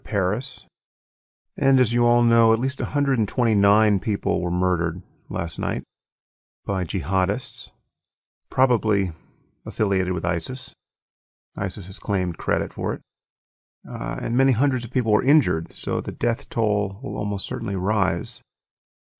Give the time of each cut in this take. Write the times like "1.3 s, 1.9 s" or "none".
11.7 s